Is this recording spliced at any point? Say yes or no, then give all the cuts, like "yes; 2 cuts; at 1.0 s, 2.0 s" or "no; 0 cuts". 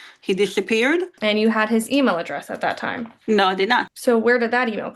yes; 2 cuts; at 1.1 s, 3.9 s